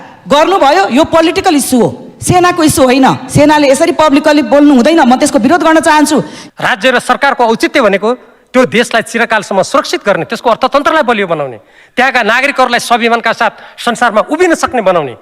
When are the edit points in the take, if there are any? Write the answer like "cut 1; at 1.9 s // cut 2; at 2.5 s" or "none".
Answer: cut 1; at 6.4 s